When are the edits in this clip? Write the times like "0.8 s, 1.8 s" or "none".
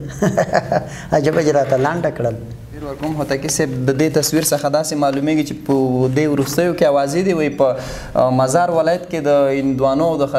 3.0 s